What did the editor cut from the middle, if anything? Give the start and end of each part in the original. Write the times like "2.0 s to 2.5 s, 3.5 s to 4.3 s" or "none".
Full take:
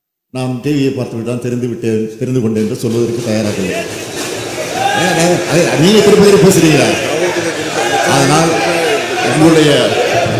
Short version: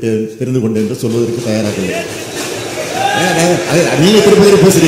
none

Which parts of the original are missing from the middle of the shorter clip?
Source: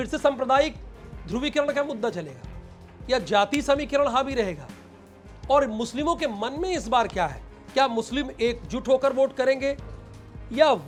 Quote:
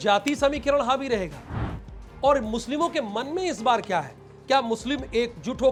none

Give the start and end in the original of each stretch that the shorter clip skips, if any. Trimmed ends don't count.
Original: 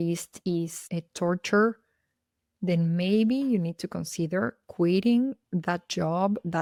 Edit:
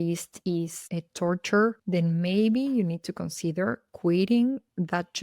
1.8 s to 2.6 s

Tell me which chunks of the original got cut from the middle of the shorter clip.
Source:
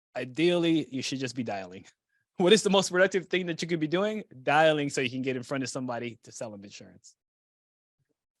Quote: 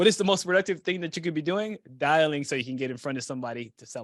none

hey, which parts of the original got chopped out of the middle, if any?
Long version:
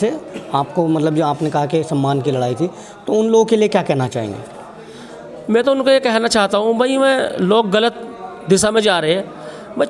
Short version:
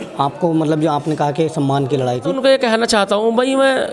2.7 s to 5.8 s

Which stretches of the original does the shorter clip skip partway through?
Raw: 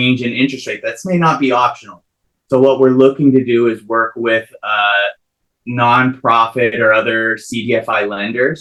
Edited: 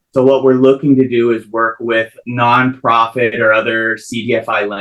4.6 s to 5.6 s

